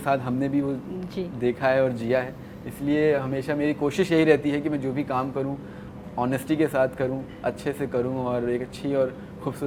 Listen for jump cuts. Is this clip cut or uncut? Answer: uncut